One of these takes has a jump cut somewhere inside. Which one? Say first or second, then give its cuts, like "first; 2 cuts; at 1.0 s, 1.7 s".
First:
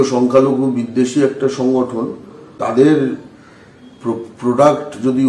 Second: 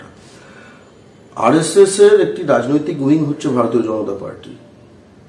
first; 1 cut; at 2.5 s